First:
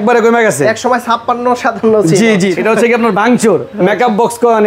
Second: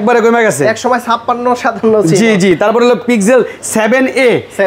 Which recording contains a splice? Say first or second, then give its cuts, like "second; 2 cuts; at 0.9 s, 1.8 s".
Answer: first; 1 cut; at 2.5 s